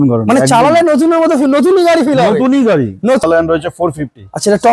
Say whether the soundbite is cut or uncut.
cut